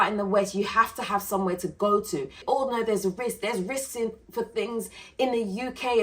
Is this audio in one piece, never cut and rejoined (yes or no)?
no